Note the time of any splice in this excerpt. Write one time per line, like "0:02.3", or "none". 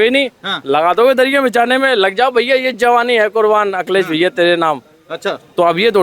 none

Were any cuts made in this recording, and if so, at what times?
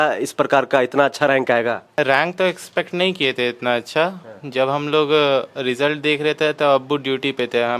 0:02.0

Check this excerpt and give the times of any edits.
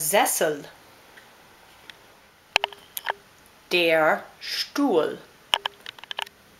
0:02.5

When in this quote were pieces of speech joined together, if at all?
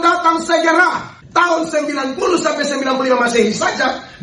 0:01.1

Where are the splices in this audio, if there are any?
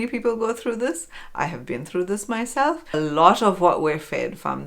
0:02.9

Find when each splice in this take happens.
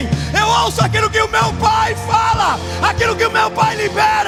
none

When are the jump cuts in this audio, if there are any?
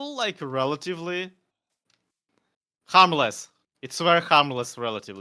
none

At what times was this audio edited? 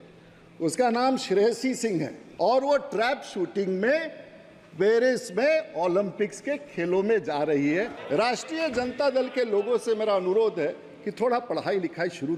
0:02.2
0:08.0

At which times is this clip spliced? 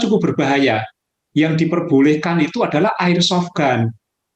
0:01.2

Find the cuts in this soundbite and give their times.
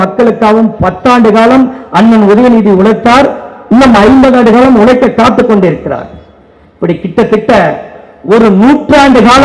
none

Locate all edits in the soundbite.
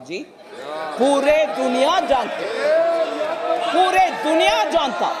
none

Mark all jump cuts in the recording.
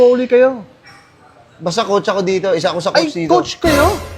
none

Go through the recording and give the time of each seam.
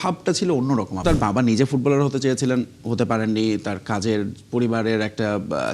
0:01.0

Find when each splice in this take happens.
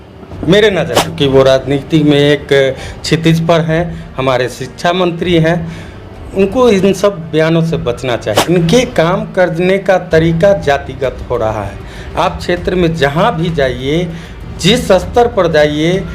0:01.1
0:08.3

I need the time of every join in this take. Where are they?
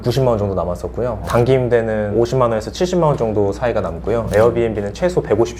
none

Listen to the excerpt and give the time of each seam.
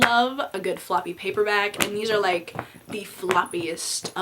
none

